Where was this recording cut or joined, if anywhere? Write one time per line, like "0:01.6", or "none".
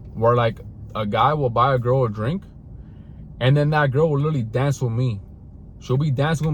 none